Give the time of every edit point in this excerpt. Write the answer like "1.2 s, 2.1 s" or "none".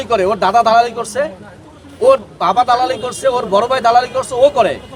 none